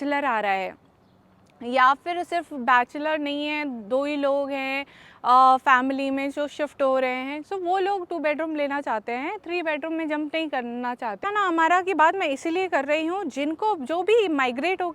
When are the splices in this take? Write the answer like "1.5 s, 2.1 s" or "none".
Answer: 11.3 s